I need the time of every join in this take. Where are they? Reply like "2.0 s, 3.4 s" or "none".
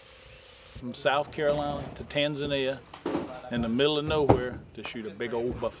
0.9 s, 2.9 s